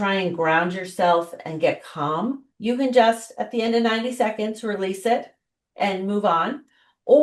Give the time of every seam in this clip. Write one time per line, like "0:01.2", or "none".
0:02.5